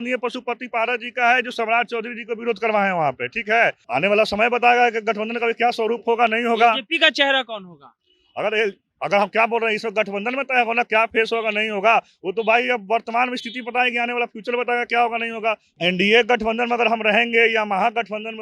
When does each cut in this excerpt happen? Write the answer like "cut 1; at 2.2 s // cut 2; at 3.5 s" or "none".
cut 1; at 3.8 s // cut 2; at 15.7 s